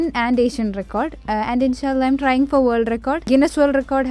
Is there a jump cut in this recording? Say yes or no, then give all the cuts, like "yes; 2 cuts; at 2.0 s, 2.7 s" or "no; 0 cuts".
yes; 2 cuts; at 1.2 s, 3.3 s